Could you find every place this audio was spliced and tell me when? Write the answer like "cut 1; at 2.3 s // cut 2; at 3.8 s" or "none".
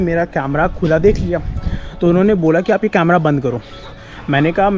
none